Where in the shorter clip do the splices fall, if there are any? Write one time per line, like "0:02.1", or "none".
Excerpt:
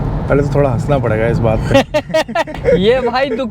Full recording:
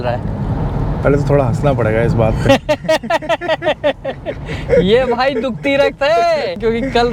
0:02.5